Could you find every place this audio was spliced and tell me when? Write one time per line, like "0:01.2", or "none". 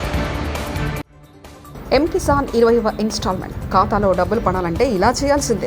0:01.1

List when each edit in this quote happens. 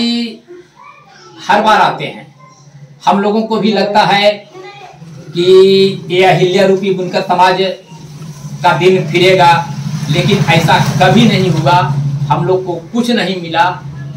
none

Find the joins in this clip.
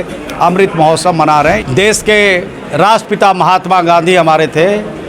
0:01.6

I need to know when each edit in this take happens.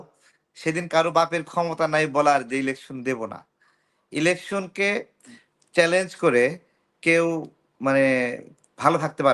none

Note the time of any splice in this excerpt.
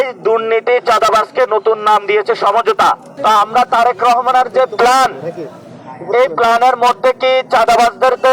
0:03.1

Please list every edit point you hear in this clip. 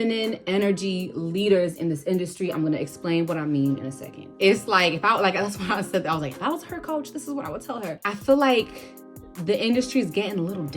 0:04.2
0:08.1

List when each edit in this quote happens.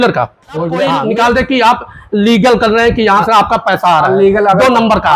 none

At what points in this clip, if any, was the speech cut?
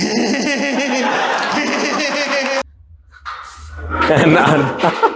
0:02.8

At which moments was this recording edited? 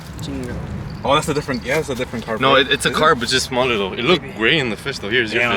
none

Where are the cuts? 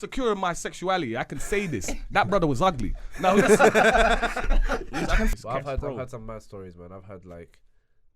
0:05.3

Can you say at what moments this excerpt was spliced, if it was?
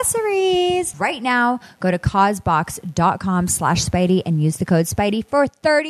none

